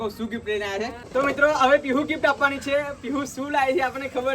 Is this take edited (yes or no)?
yes